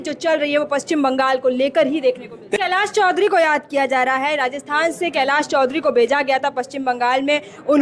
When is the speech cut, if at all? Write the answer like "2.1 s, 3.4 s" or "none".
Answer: 2.5 s